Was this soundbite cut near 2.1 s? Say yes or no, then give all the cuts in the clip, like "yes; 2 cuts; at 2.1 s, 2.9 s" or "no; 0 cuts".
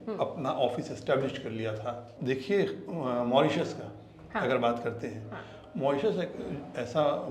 yes; 1 cut; at 2.1 s